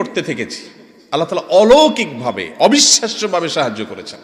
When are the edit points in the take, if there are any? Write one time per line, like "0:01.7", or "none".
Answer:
none